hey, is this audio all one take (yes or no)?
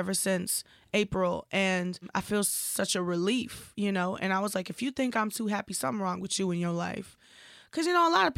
no